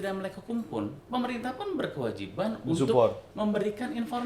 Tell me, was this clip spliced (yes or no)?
yes